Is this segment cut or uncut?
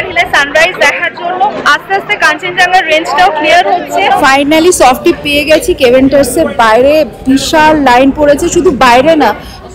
cut